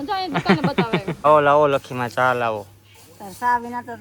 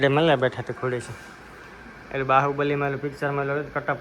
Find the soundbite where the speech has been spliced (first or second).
first